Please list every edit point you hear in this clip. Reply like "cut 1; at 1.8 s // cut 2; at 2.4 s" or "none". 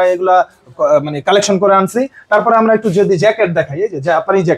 none